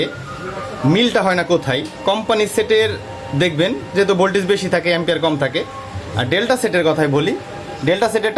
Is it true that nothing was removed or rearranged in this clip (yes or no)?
yes